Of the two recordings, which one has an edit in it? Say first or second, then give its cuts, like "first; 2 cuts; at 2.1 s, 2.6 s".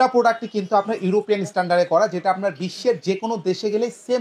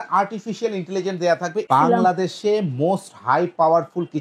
second; 1 cut; at 1.7 s